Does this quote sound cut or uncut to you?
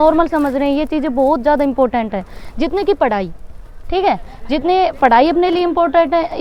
uncut